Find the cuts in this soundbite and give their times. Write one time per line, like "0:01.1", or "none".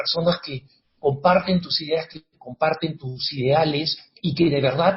0:03.0
0:04.0